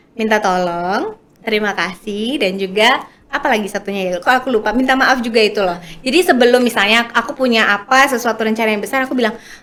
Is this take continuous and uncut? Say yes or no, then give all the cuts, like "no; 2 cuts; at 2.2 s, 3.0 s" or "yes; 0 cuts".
yes; 0 cuts